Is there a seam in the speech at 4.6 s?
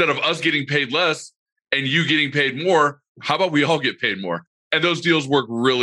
yes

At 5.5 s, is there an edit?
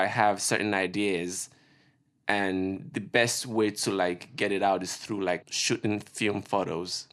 yes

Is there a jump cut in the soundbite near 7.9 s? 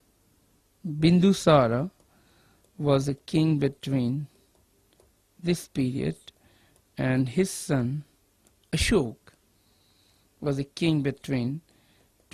yes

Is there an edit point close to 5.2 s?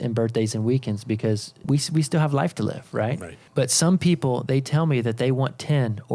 no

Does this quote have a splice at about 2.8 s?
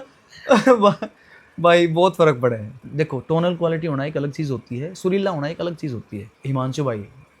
yes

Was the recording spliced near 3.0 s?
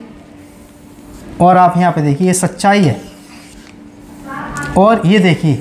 no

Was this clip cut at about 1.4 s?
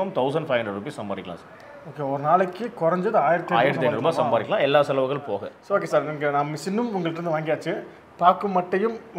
no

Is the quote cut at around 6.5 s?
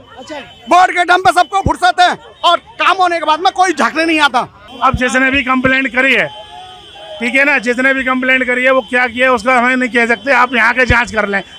no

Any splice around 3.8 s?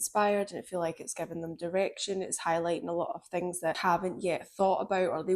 yes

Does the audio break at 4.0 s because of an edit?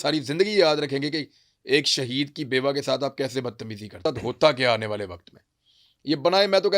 yes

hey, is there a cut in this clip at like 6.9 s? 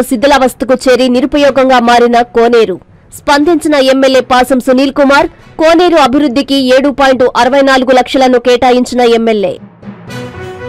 no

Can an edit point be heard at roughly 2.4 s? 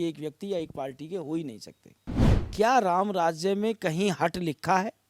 yes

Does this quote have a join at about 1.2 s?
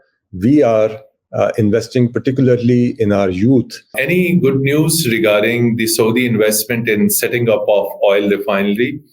no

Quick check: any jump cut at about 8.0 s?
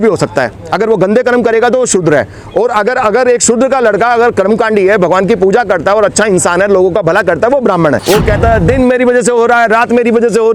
yes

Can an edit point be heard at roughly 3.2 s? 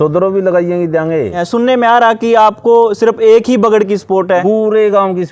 no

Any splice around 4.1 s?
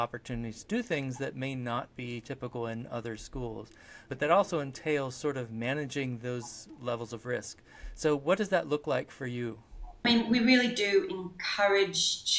yes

